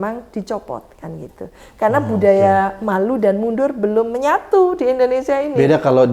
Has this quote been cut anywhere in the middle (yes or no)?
no